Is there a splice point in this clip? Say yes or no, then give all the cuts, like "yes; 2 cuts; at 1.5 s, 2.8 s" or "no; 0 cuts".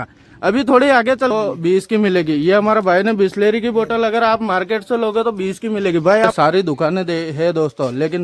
yes; 2 cuts; at 1.3 s, 6.3 s